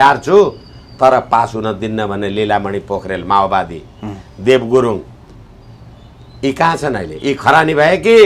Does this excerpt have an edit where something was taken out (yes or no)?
no